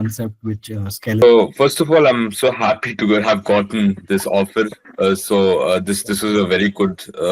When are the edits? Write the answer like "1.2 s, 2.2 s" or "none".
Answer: 1.2 s